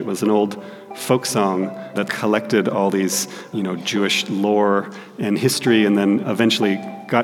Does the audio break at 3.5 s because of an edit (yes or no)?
yes